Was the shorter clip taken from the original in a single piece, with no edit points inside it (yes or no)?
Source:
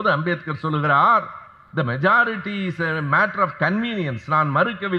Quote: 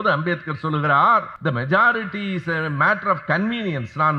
no